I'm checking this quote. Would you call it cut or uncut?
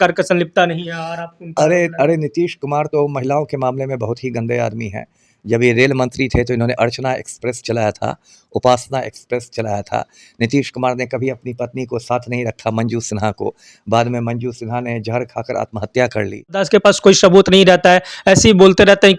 cut